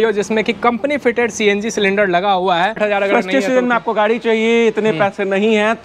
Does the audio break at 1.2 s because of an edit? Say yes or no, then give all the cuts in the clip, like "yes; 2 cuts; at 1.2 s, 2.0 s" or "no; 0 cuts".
no; 1 cut; at 2.8 s